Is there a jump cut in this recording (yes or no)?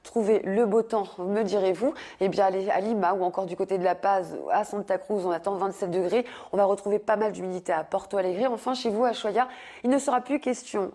yes